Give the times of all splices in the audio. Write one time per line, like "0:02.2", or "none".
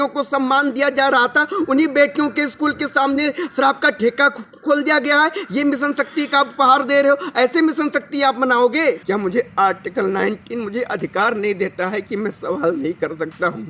0:09.0